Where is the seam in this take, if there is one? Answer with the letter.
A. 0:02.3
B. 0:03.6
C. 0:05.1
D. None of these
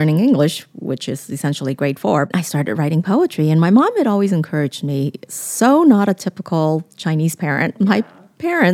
A